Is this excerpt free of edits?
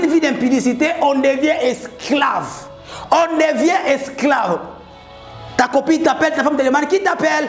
yes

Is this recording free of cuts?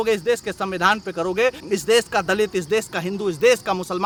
yes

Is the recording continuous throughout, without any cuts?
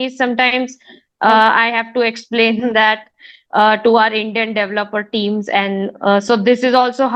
yes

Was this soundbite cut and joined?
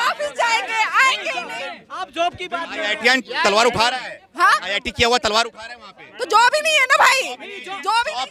no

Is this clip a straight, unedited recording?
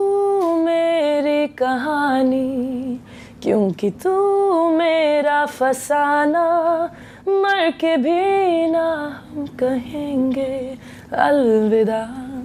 yes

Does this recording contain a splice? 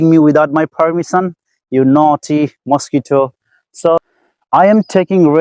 yes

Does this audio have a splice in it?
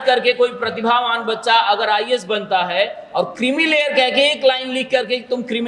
no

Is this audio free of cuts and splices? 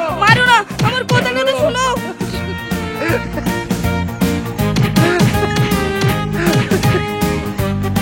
yes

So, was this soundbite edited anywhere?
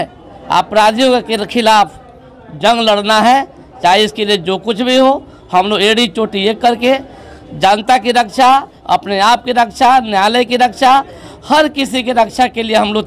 no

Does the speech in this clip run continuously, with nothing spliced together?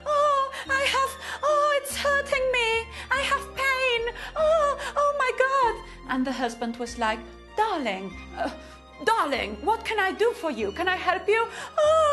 yes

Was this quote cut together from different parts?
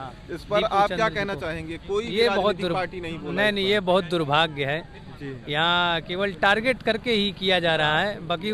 no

